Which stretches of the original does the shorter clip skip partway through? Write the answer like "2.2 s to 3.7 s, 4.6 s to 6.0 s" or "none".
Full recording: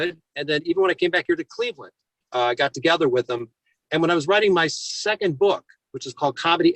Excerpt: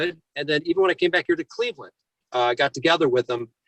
none